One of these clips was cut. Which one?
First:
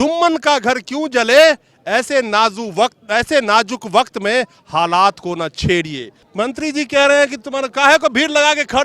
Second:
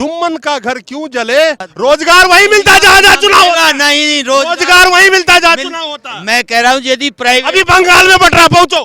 second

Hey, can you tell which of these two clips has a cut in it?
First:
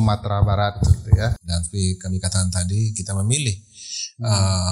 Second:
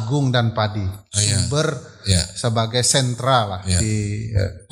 first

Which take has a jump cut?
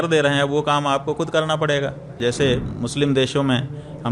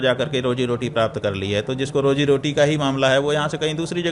first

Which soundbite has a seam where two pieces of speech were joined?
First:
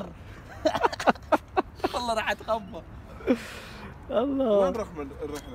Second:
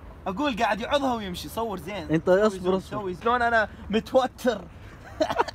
second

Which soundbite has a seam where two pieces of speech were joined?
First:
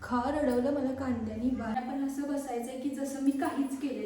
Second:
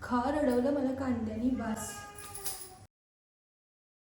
first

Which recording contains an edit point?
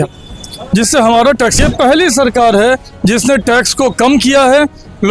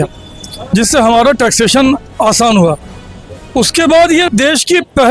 first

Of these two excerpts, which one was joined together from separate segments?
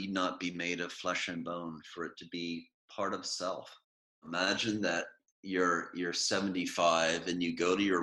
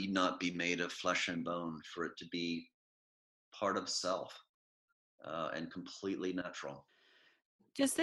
first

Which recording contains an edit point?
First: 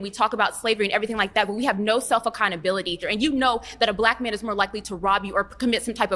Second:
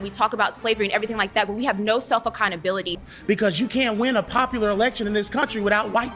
second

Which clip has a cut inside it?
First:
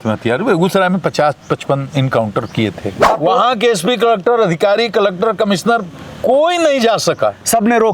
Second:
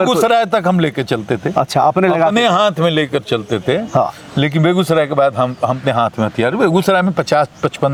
first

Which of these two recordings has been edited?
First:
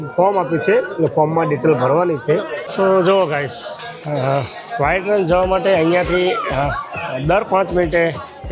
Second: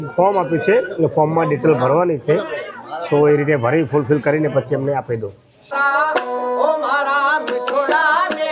first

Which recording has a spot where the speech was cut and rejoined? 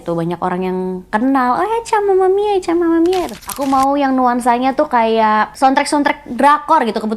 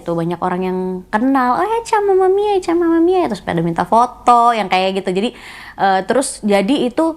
first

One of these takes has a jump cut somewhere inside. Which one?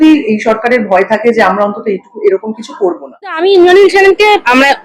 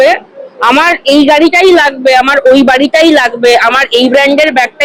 first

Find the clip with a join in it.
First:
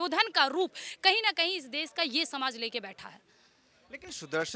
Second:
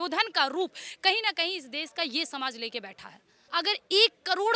second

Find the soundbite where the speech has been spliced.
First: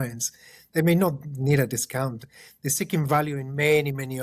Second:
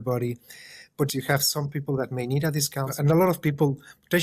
second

